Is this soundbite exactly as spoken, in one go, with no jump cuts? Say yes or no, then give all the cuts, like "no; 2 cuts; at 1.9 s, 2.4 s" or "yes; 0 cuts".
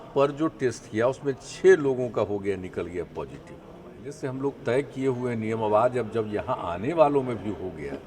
no; 1 cut; at 4.2 s